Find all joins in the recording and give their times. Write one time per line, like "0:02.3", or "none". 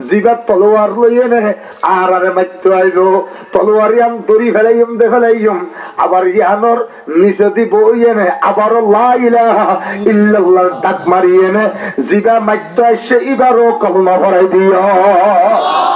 none